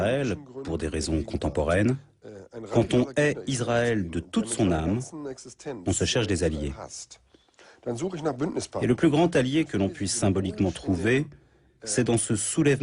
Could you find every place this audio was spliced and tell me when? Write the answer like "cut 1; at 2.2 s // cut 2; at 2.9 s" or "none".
none

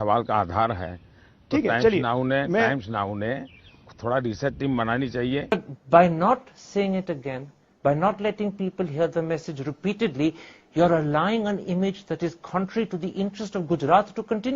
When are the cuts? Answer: cut 1; at 5.5 s

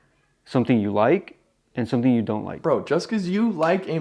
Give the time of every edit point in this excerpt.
cut 1; at 2.5 s

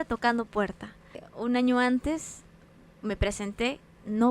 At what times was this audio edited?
cut 1; at 1.2 s

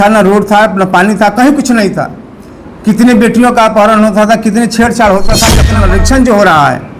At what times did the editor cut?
cut 1; at 5.7 s

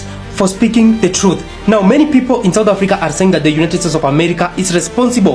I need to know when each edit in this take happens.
none

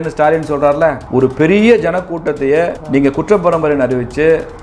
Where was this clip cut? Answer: cut 1; at 2.8 s

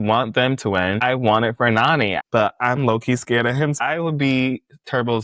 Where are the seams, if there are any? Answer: cut 1; at 1.0 s // cut 2; at 2.2 s // cut 3; at 3.8 s

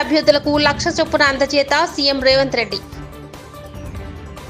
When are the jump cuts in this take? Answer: cut 1; at 2.8 s

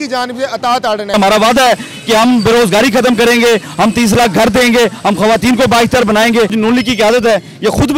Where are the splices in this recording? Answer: cut 1; at 1.1 s // cut 2; at 6.5 s

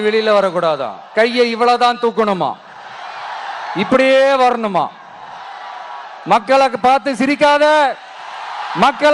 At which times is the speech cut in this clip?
cut 1; at 1.0 s

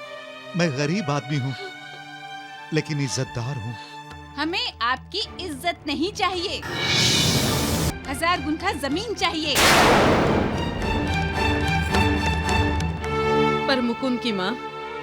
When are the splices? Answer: cut 1; at 7.9 s

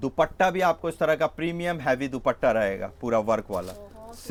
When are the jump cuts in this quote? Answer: none

